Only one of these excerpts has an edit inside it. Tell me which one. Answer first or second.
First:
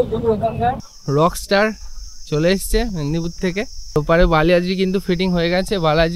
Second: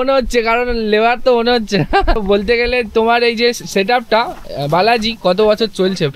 first